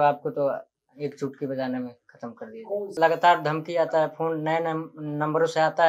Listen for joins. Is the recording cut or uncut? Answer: cut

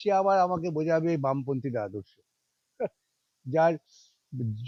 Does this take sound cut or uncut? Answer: uncut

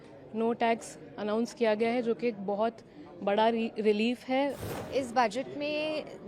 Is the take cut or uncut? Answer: cut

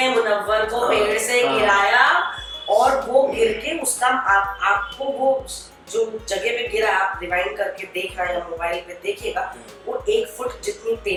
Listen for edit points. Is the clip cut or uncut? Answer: uncut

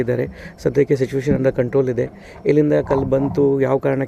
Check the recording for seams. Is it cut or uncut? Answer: uncut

